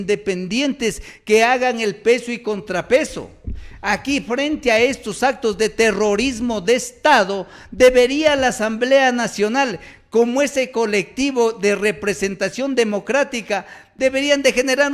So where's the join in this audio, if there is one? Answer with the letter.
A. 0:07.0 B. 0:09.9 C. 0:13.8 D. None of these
C